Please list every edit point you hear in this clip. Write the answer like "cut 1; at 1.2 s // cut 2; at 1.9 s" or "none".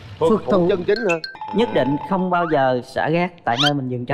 cut 1; at 1.3 s